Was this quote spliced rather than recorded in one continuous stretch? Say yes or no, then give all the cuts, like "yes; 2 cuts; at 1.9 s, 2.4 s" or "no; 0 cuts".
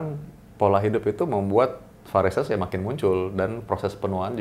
no; 0 cuts